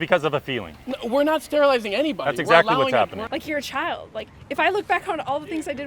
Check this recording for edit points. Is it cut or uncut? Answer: cut